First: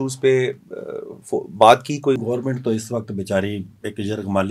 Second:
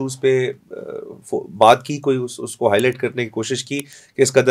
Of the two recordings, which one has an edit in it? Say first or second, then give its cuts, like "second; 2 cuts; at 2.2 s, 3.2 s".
first; 1 cut; at 2.2 s